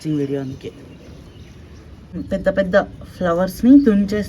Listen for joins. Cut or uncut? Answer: cut